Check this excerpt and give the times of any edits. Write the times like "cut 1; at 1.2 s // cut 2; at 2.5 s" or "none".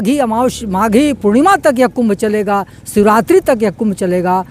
none